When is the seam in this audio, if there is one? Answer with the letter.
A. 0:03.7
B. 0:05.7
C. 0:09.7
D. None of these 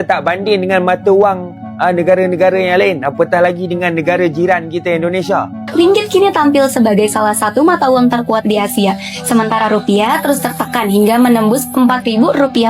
B